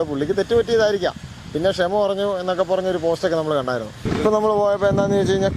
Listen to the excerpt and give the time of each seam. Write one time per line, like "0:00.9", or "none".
0:04.0